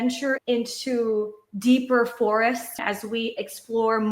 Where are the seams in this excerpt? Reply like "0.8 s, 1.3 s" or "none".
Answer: 2.8 s